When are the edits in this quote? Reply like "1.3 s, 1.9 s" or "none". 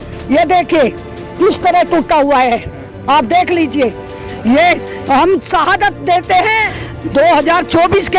6.7 s